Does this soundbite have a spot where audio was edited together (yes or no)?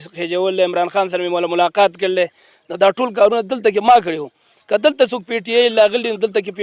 no